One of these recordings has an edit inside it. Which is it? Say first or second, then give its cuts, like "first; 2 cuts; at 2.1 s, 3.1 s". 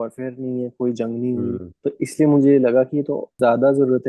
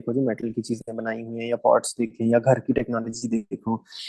first; 2 cuts; at 1.7 s, 3.2 s